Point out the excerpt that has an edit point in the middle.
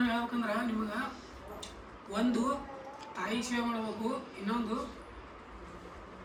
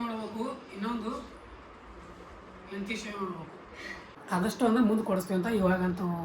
second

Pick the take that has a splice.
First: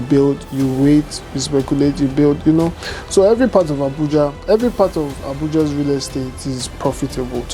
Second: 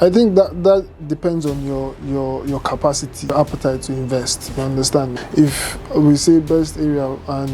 second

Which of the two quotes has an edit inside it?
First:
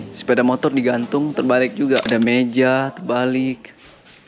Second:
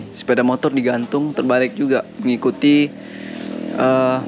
first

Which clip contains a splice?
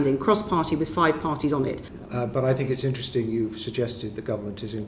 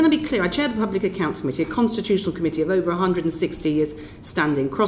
first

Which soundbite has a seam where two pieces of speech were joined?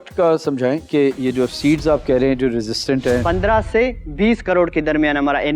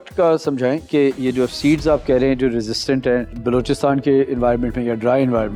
first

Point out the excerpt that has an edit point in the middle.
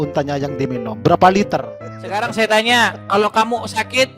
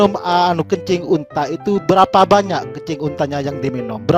first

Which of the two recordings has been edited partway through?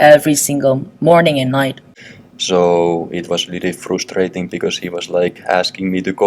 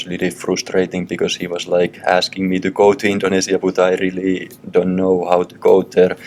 first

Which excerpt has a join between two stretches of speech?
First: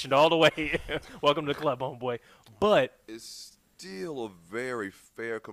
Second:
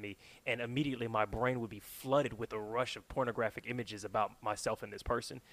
first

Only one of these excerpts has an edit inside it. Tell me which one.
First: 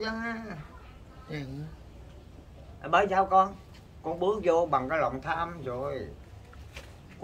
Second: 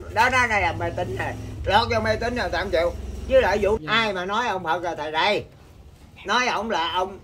second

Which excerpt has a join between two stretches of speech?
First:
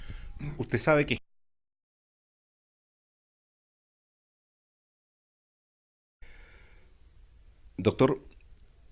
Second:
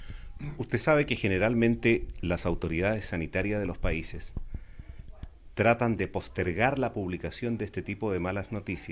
second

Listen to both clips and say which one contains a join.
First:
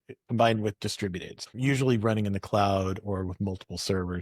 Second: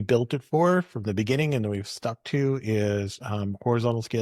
first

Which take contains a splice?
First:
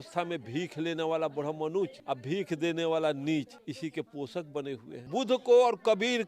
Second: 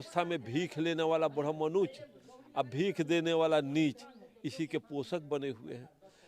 first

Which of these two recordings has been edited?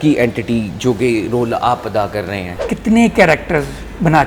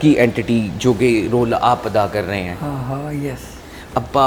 first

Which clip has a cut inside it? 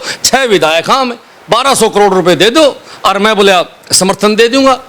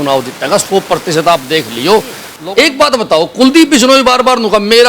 second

